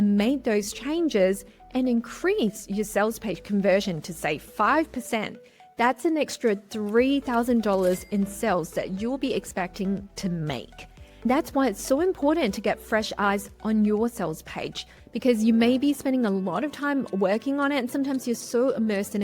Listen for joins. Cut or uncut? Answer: cut